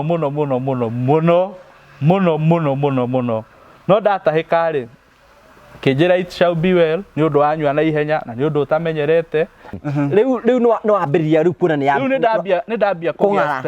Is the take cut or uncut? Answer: cut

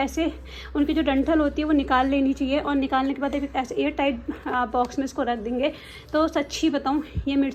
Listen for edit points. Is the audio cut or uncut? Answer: uncut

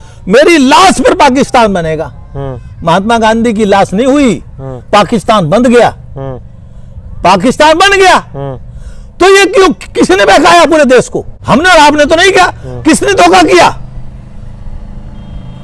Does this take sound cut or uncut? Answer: uncut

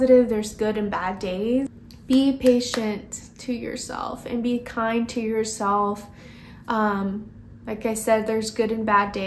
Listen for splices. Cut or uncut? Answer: cut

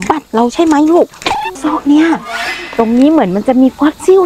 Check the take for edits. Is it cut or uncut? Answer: cut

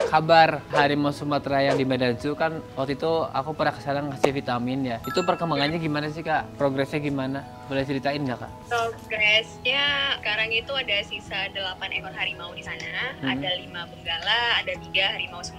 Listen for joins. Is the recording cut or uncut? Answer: uncut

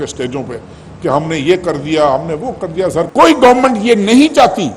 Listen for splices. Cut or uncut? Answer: cut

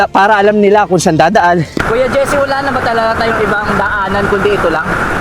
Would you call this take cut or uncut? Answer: cut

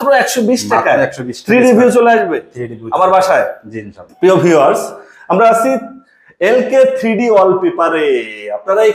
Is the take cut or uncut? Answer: uncut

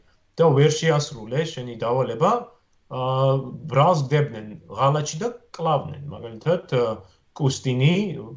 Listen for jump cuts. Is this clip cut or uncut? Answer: uncut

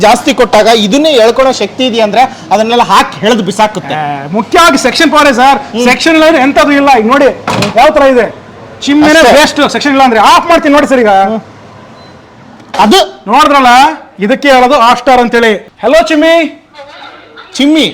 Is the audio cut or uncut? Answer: cut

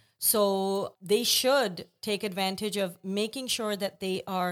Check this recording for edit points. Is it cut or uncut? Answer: uncut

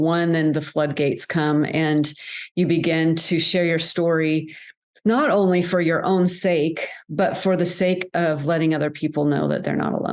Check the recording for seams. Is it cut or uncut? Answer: uncut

